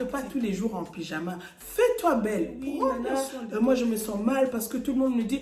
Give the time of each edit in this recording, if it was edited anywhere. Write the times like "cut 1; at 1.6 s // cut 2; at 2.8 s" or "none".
cut 1; at 3.1 s